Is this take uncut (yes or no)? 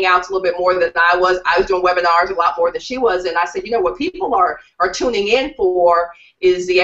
no